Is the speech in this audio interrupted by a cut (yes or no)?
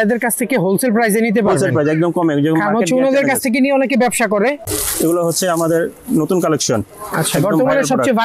yes